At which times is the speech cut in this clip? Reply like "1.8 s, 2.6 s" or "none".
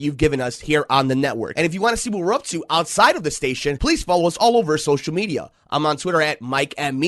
1.4 s